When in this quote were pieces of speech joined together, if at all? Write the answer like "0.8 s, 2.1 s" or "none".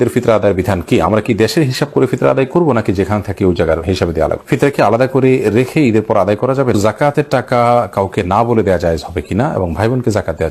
4.4 s, 6.8 s